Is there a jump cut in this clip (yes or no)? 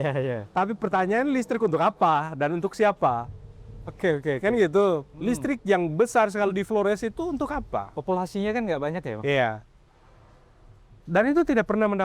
no